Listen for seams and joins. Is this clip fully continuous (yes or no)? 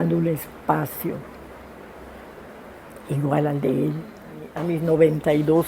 no